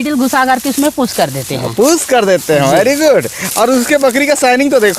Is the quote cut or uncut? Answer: uncut